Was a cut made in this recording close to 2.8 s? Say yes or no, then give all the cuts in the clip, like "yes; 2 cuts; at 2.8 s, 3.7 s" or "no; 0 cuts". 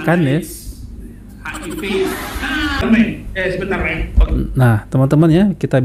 yes; 1 cut; at 2.8 s